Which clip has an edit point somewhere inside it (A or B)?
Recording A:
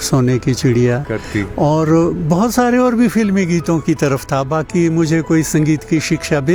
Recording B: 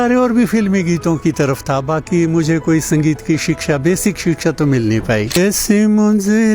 B